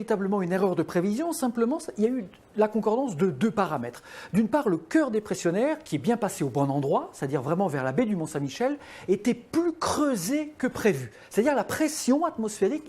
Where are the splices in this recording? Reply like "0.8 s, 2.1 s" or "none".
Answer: 4.9 s